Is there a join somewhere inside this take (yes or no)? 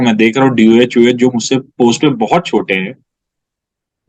no